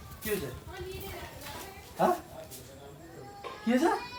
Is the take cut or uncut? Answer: uncut